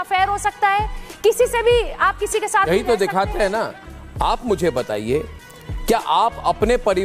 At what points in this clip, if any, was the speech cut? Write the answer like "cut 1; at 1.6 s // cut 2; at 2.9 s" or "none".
cut 1; at 3.7 s

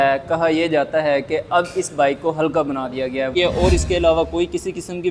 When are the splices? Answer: cut 1; at 3.3 s

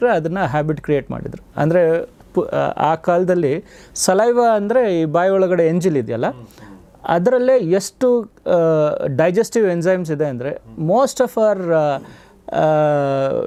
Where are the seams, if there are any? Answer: none

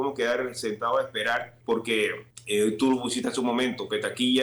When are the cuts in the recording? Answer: cut 1; at 1.5 s // cut 2; at 2.3 s

